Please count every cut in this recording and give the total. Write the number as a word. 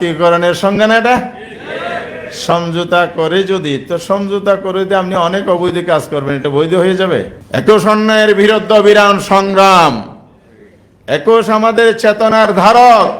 one